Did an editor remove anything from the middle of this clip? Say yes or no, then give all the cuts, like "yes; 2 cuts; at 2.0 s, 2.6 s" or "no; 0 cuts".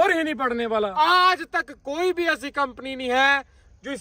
yes; 1 cut; at 0.9 s